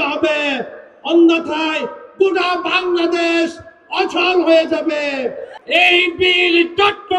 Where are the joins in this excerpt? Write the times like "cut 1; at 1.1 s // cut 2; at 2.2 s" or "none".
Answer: cut 1; at 5.5 s